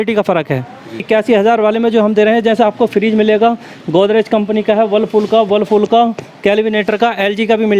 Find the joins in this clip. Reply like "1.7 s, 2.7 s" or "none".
1.0 s